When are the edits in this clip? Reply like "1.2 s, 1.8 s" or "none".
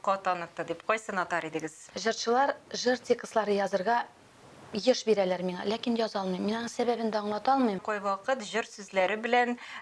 1.8 s, 7.9 s